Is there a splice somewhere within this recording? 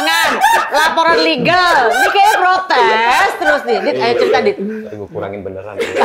yes; 1 cut; at 4.8 s

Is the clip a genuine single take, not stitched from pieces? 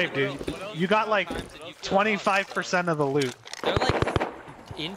no; 1 cut; at 3.6 s

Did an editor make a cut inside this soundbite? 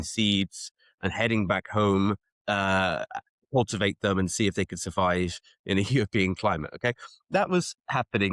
no; 0 cuts

